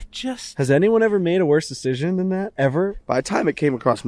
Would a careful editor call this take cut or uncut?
cut